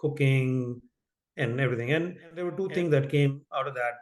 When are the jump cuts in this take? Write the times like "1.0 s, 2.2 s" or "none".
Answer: 2.5 s